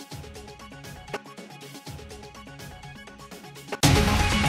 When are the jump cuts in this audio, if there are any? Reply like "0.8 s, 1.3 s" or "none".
none